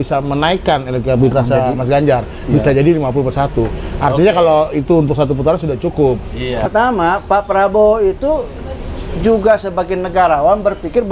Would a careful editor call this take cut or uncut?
cut